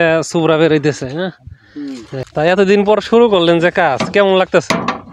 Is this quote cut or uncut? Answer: cut